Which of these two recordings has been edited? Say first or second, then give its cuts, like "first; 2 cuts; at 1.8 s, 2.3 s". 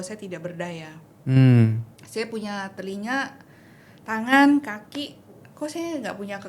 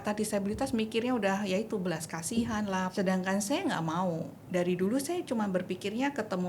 second; 1 cut; at 2.9 s